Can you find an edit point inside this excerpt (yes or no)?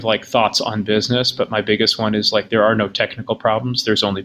no